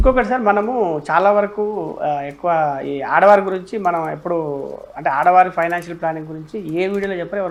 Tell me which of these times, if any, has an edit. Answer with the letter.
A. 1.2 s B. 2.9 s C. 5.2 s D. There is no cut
D